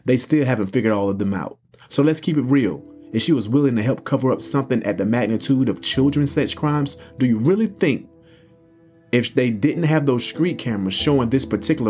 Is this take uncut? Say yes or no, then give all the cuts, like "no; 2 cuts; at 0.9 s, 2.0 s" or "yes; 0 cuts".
yes; 0 cuts